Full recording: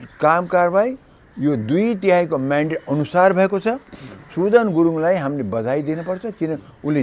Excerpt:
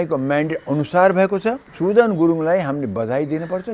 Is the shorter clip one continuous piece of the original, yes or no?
no